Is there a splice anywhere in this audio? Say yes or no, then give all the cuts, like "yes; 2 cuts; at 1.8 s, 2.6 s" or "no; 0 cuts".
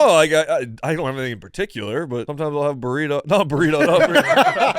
yes; 1 cut; at 2.3 s